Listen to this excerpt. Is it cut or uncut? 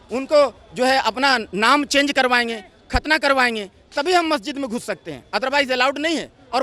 uncut